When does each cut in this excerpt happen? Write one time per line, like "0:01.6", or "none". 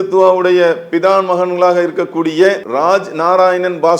0:02.6